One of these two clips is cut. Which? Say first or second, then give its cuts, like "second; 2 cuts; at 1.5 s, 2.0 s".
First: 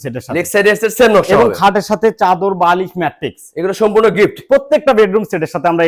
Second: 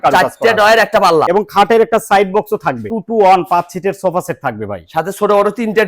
second; 2 cuts; at 1.3 s, 2.9 s